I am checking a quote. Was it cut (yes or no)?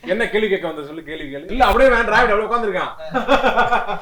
yes